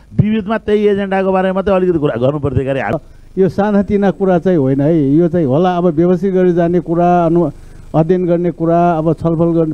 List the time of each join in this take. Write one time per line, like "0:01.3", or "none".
0:02.9